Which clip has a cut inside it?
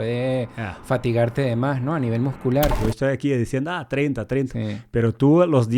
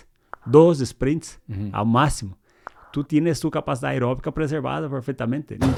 first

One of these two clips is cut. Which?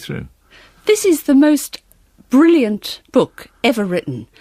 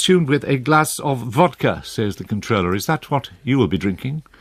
second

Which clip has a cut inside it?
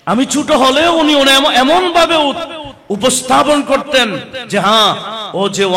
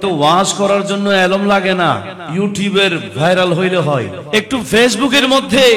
second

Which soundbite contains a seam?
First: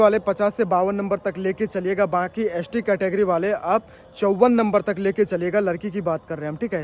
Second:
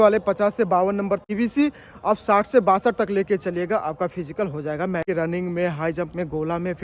second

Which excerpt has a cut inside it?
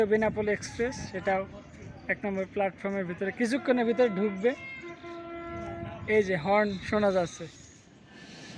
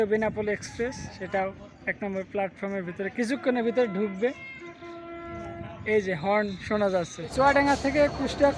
second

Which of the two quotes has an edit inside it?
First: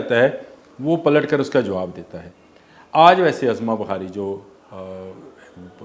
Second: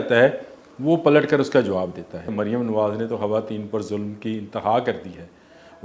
second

